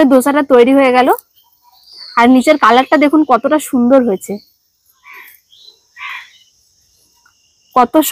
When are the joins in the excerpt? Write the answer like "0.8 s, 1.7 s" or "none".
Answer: none